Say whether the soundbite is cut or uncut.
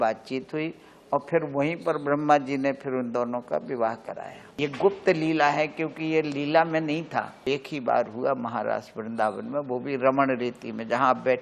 cut